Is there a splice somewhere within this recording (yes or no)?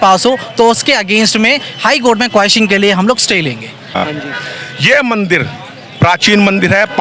yes